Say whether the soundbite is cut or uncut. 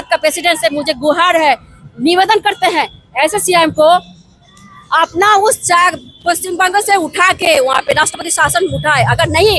uncut